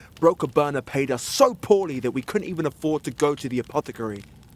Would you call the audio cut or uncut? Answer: uncut